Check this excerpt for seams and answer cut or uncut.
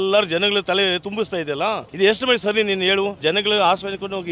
cut